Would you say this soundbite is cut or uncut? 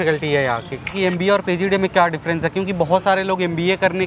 cut